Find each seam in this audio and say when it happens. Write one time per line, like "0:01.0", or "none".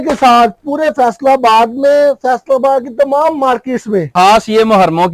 0:04.1